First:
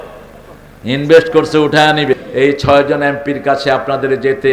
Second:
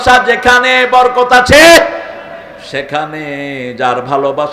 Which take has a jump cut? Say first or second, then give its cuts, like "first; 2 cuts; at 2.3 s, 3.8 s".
first; 1 cut; at 2.2 s